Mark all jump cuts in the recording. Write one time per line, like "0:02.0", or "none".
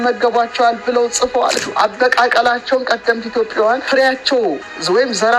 0:01.6
0:03.8